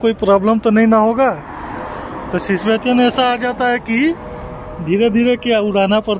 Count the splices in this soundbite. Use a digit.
0